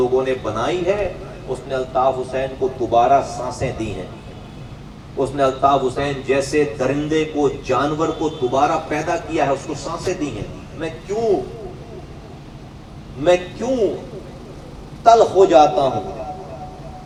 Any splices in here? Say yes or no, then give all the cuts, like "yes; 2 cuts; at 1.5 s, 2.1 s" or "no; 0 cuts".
no; 0 cuts